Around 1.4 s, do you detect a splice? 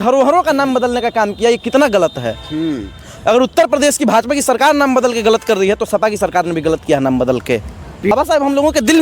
no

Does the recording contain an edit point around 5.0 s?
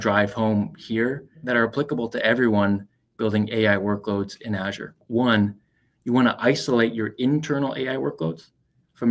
yes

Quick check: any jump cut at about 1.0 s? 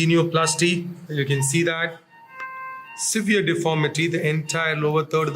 yes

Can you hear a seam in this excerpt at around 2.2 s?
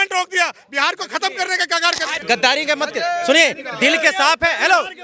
yes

